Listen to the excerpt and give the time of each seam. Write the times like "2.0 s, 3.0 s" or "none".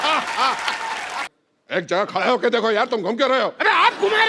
1.3 s